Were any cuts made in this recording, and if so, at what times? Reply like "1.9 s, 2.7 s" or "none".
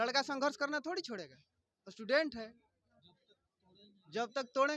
none